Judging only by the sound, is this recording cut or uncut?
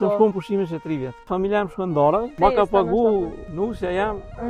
cut